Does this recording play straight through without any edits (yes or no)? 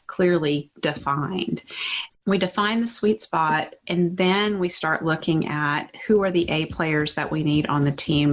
no